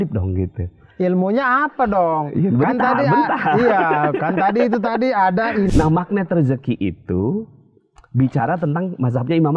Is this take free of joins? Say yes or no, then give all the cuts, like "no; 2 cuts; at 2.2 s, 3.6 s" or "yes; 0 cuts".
no; 1 cut; at 5.7 s